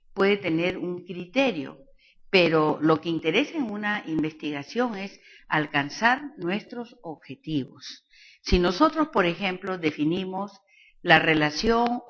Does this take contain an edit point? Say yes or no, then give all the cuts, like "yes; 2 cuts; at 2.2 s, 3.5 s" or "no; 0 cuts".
yes; 1 cut; at 7.9 s